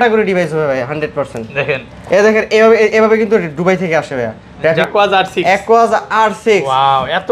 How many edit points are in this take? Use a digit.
1